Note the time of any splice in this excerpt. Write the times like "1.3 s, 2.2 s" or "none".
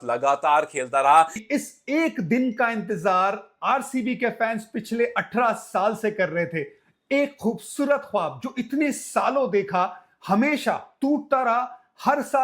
1.4 s